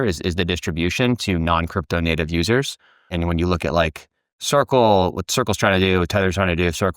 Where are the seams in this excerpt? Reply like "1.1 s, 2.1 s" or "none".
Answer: 3.1 s

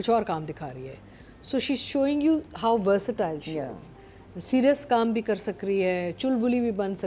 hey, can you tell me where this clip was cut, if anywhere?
none

